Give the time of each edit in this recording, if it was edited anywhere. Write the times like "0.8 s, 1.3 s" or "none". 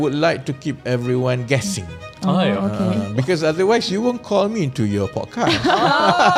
none